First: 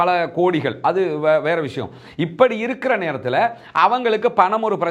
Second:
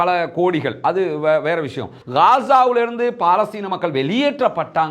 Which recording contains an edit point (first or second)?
second